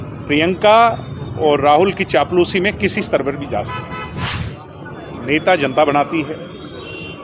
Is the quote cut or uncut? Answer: cut